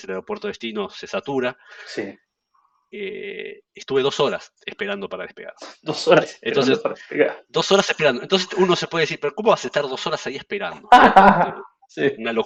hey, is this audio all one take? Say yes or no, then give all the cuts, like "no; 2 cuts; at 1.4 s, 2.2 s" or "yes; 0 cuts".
yes; 0 cuts